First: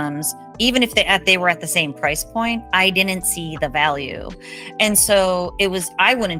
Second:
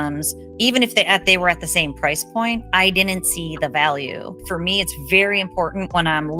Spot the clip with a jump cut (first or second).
second